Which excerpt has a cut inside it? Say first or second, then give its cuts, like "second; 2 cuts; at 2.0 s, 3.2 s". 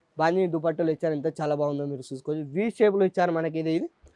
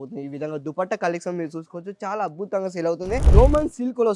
second; 1 cut; at 3.2 s